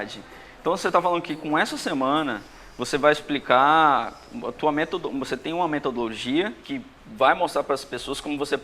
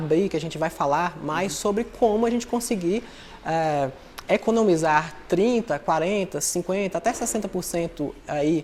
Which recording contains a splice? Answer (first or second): first